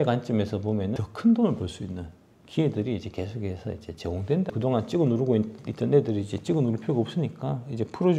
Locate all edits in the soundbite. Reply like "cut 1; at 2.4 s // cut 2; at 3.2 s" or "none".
cut 1; at 1.0 s // cut 2; at 4.5 s